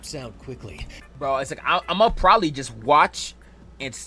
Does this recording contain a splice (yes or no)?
yes